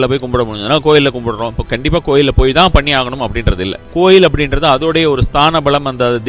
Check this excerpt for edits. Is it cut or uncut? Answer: cut